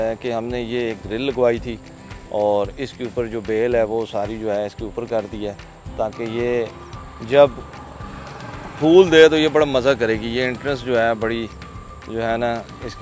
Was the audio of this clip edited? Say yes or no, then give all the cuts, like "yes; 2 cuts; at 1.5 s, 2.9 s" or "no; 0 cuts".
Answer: no; 0 cuts